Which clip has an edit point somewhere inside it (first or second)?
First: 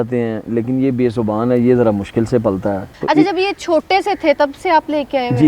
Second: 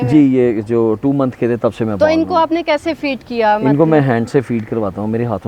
first